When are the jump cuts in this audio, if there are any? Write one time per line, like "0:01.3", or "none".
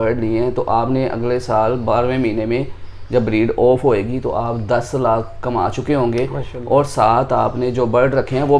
none